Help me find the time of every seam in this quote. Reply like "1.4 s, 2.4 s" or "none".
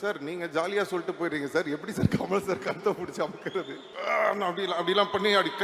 3.9 s